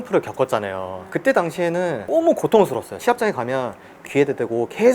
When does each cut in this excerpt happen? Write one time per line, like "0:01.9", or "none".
0:03.0
0:04.0